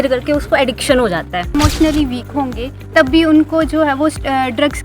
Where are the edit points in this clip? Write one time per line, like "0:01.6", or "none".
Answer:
0:01.5